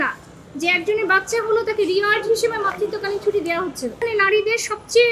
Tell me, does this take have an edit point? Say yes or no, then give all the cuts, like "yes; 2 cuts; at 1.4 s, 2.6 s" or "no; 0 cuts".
yes; 1 cut; at 4.0 s